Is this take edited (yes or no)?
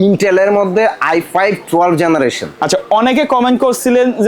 no